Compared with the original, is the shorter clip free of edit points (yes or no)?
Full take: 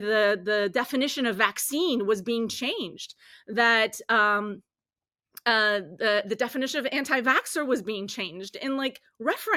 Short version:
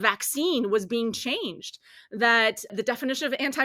no